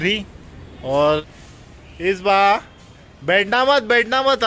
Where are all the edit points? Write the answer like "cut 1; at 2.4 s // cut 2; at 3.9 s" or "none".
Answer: cut 1; at 1.3 s